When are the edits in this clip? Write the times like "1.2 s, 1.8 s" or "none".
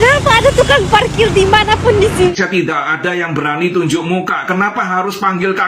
2.3 s